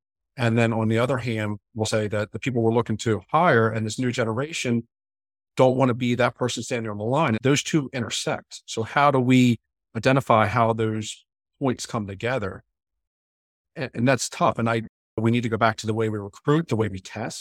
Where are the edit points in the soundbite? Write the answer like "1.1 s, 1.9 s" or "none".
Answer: 1.9 s, 7.4 s